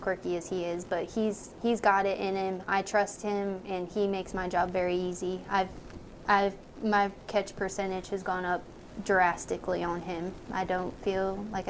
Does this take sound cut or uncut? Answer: uncut